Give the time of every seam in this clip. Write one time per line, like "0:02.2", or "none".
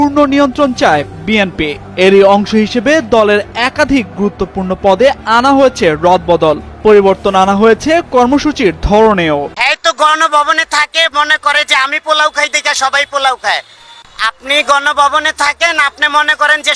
0:09.5